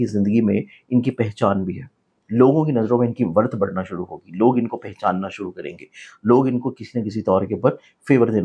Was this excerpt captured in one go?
yes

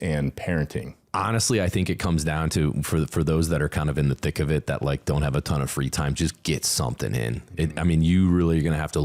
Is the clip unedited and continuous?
no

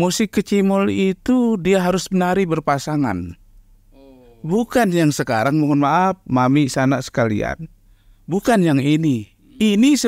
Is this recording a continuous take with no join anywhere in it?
yes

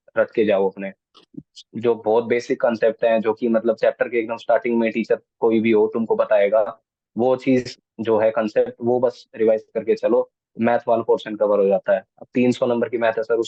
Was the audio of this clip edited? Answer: no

